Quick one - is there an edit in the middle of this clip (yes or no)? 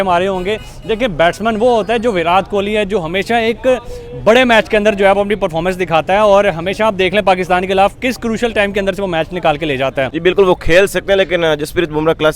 yes